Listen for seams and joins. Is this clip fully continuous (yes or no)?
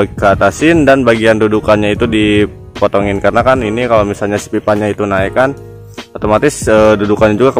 yes